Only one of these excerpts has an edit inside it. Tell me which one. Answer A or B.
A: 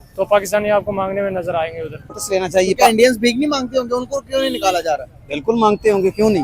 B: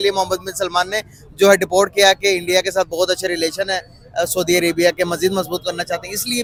A